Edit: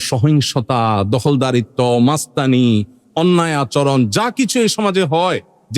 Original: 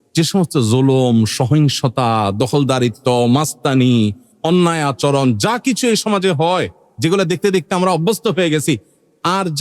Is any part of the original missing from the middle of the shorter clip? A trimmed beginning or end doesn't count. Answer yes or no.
no